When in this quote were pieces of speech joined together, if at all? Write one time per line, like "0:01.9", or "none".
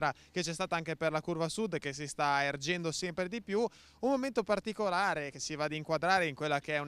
0:04.9